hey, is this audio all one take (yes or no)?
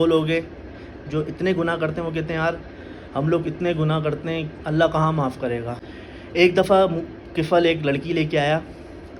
no